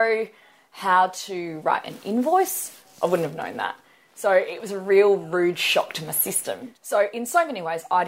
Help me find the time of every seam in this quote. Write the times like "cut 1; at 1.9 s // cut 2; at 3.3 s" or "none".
cut 1; at 6.5 s